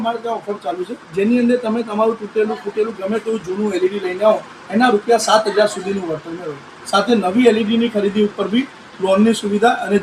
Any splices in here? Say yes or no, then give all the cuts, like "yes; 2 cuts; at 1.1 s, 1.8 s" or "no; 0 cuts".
no; 0 cuts